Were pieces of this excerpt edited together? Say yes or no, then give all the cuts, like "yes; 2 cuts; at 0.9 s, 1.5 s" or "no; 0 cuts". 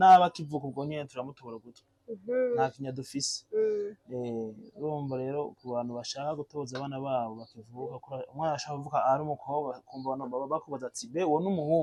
no; 0 cuts